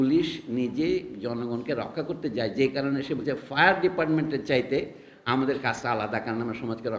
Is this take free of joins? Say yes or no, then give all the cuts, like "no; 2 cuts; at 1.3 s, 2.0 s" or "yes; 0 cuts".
yes; 0 cuts